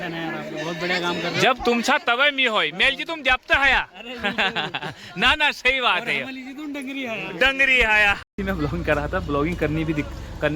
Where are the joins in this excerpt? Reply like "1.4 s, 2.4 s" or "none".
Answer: 8.3 s